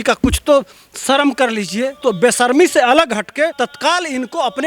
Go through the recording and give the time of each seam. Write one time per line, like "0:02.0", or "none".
0:01.9
0:03.5